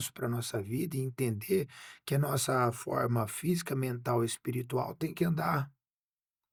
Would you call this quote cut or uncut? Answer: uncut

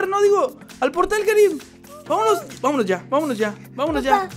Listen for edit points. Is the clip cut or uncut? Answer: uncut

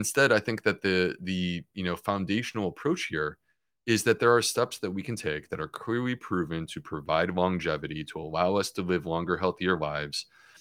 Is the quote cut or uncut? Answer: uncut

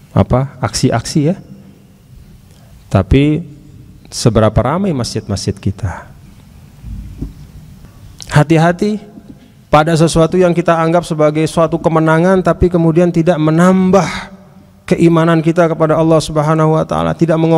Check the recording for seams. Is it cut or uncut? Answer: cut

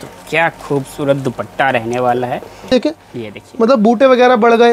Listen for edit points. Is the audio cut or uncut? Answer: cut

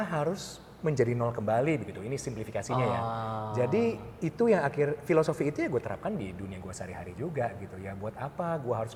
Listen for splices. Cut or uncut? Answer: uncut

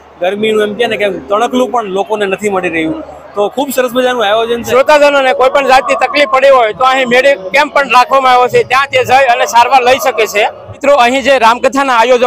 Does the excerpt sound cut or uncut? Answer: cut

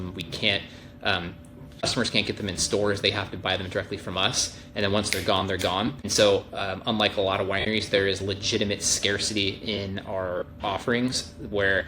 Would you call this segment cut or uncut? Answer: cut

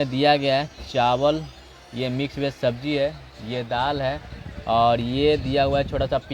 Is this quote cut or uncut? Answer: uncut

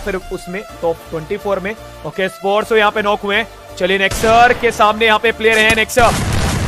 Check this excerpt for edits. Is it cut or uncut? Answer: uncut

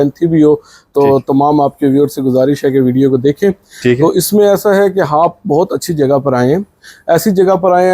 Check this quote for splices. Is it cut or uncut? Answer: uncut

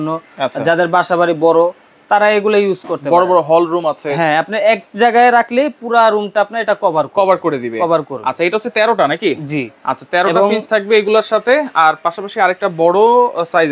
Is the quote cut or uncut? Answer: uncut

